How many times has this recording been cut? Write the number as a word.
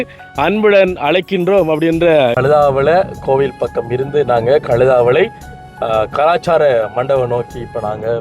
one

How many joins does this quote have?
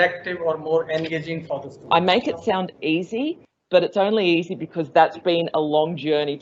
one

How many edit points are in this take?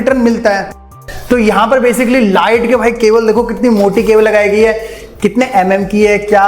one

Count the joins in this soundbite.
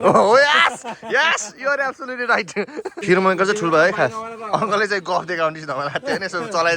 one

